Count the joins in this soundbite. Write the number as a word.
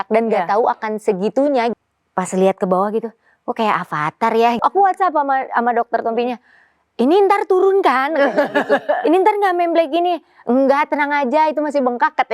two